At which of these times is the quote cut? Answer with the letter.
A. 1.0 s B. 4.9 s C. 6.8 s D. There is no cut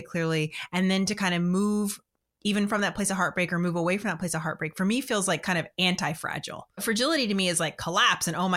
C